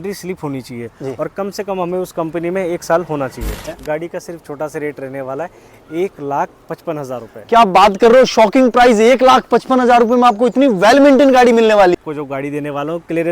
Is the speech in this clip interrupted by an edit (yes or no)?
yes